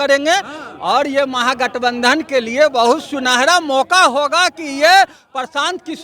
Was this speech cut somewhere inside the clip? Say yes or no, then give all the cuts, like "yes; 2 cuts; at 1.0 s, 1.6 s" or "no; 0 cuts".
no; 0 cuts